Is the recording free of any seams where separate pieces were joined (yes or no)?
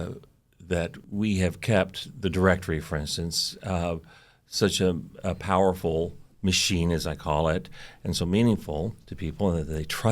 no